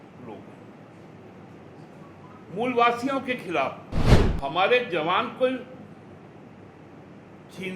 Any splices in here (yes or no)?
yes